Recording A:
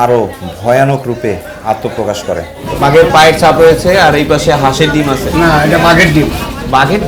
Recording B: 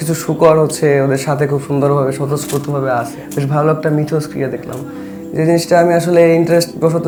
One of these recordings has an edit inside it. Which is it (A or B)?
A